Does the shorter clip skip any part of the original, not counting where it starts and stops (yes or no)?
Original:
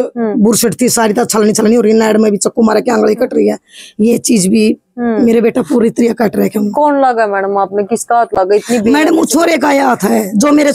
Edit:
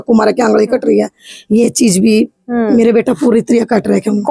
no